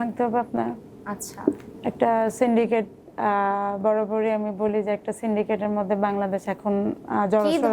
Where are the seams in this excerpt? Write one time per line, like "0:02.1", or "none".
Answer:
none